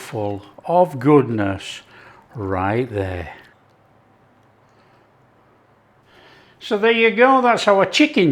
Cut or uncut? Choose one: cut